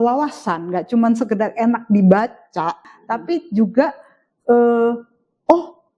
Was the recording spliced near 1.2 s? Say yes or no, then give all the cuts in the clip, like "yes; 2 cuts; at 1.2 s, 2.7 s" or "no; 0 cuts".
no; 1 cut; at 2.9 s